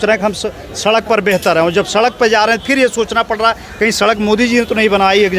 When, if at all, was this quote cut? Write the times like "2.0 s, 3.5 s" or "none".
none